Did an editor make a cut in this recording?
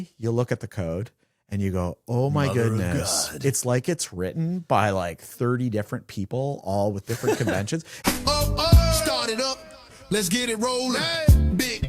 yes; 1 cut; at 7.9 s

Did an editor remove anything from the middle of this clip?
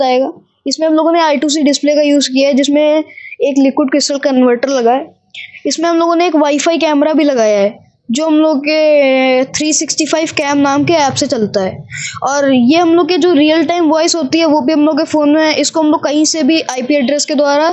no; 0 cuts

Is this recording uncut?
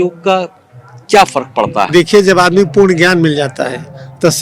yes; 0 cuts

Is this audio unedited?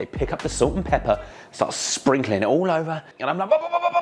no; 1 cut; at 3.0 s

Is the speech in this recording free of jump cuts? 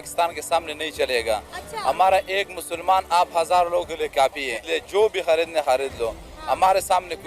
no; 1 cut; at 4.6 s

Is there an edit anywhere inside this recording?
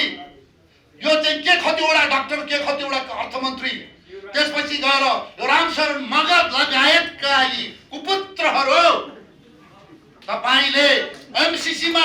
no; 0 cuts

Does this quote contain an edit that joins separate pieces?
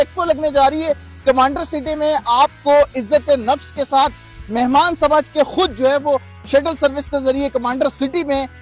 no; 0 cuts

